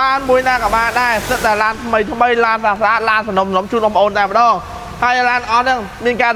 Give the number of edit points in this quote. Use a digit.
0